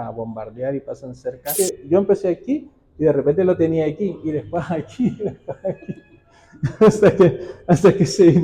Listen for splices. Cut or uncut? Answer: cut